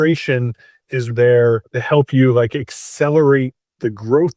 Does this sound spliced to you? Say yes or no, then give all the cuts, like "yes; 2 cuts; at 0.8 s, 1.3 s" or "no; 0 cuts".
yes; 2 cuts; at 1.1 s, 1.7 s